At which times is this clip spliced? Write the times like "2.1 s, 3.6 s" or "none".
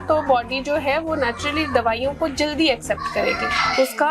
none